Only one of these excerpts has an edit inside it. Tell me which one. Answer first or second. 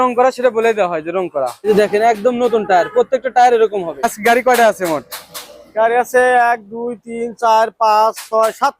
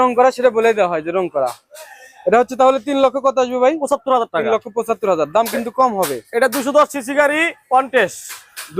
first